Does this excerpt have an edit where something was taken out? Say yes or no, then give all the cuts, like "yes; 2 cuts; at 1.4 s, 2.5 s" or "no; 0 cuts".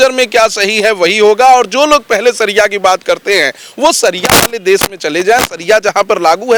no; 0 cuts